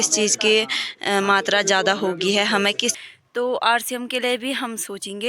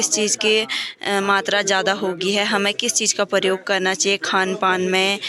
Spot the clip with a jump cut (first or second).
first